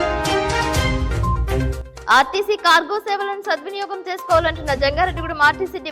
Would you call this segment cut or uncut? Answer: uncut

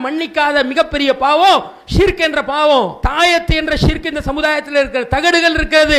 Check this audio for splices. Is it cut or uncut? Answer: cut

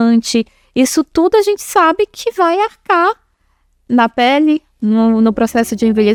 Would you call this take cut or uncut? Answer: uncut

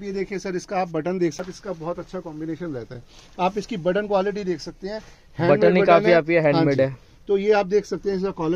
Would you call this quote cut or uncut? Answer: cut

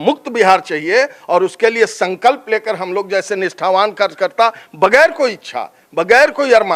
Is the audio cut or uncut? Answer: uncut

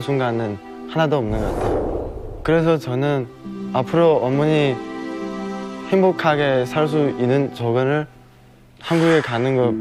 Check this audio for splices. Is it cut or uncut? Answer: uncut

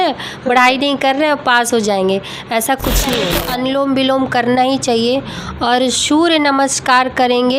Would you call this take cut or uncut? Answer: cut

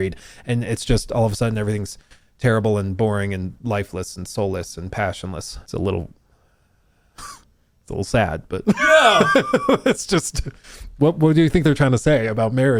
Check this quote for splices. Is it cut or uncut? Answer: uncut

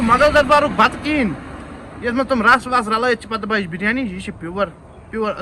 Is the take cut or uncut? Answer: uncut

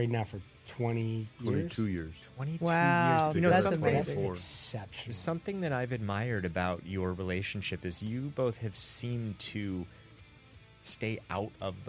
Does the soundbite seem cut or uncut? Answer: uncut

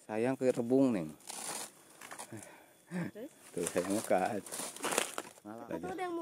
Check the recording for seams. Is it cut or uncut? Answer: cut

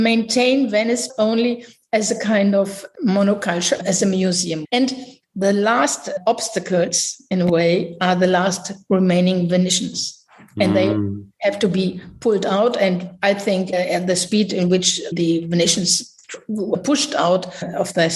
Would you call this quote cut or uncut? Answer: cut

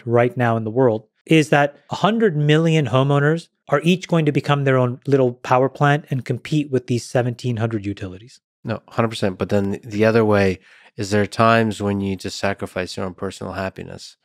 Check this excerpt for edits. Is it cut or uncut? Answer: cut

